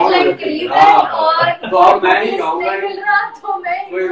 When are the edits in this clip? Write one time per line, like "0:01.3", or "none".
none

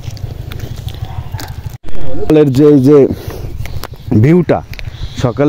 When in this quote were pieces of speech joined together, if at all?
0:02.3

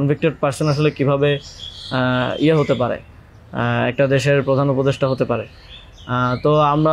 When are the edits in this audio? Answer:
none

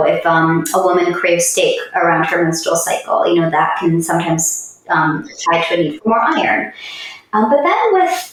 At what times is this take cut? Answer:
none

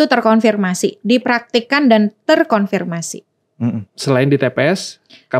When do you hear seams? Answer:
none

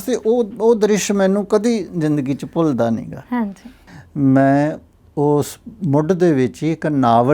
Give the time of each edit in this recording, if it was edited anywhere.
0:03.8

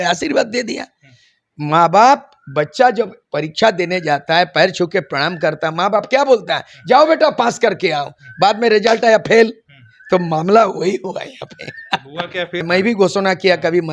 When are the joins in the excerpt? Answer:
0:12.6

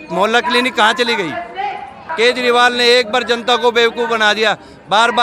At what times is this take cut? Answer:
0:01.7

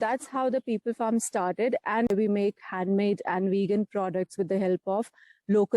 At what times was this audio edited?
0:02.1

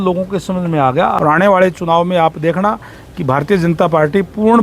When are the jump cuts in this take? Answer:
0:01.1

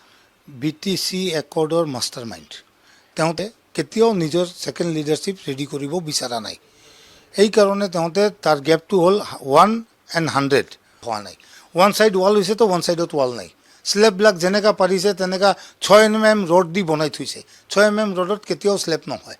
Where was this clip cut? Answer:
0:03.4
0:11.2

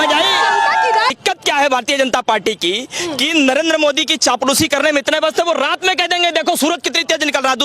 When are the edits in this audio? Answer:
0:01.1

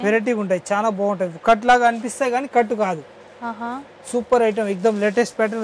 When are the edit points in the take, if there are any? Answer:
none

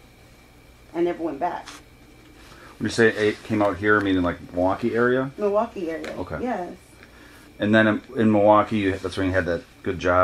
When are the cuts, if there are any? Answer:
none

